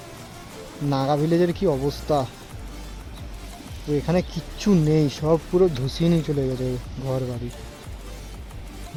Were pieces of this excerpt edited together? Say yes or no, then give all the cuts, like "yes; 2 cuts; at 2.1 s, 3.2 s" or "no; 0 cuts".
no; 0 cuts